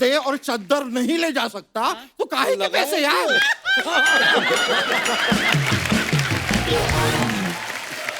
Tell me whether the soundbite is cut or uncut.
uncut